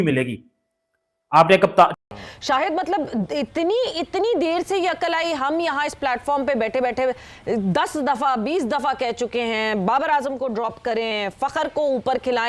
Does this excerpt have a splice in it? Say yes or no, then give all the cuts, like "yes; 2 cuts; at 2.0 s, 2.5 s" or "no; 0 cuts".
yes; 1 cut; at 1.9 s